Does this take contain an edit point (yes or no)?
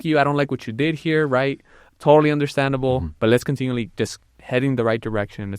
yes